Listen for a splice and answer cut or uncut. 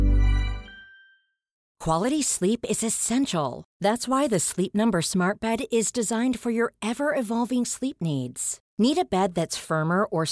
cut